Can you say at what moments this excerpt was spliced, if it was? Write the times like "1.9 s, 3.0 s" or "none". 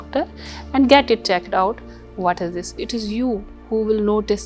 2.8 s